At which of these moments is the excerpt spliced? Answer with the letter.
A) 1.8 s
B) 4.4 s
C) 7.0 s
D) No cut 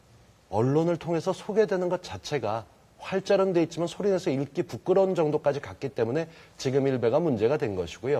C